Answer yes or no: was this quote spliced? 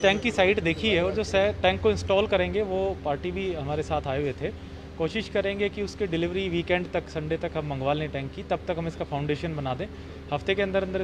no